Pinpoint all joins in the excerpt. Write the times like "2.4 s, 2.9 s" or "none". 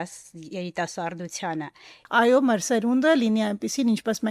2.0 s